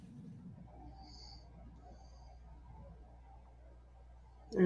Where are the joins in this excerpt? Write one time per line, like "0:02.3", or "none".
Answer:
none